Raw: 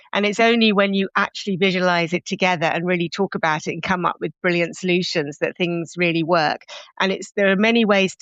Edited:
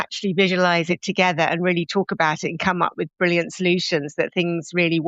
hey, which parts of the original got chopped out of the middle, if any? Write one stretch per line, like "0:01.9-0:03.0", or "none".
none